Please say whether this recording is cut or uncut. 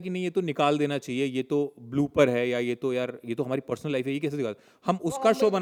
uncut